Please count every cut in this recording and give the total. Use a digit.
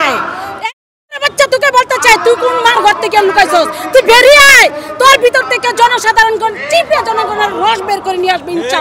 0